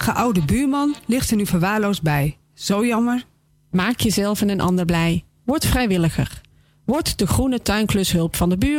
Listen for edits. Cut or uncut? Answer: uncut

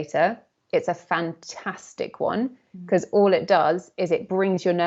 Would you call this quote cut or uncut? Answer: uncut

